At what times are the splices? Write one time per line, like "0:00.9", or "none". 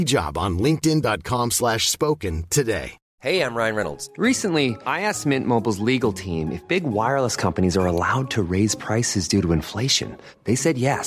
0:03.0